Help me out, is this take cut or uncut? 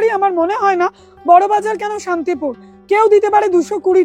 uncut